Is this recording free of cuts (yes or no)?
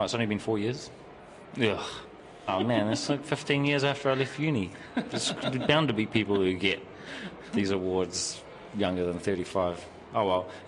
no